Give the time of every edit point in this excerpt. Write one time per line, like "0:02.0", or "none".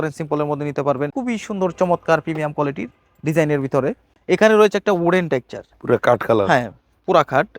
0:01.1
0:04.1